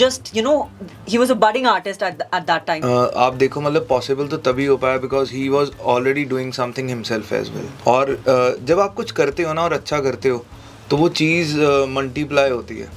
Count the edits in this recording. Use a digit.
2